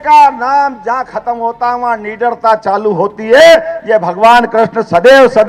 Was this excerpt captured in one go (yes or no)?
yes